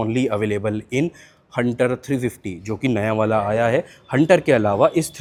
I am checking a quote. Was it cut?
no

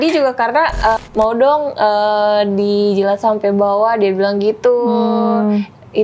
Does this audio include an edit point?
yes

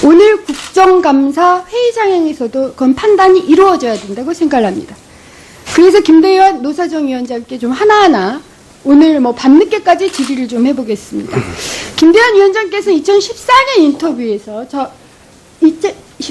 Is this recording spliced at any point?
yes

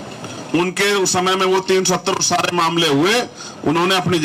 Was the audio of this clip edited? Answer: no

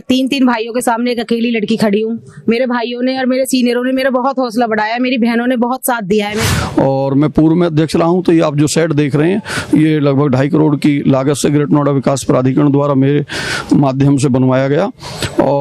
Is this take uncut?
no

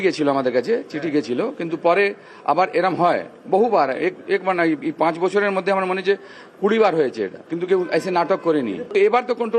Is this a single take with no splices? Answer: yes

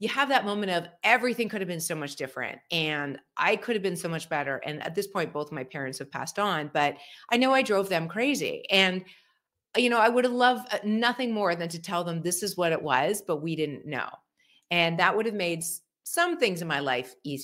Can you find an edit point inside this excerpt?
no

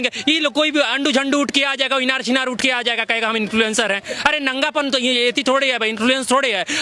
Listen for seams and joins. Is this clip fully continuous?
yes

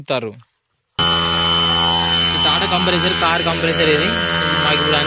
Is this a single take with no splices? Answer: no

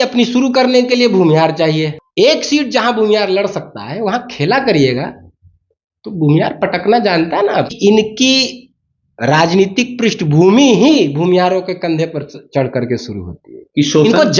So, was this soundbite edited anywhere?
yes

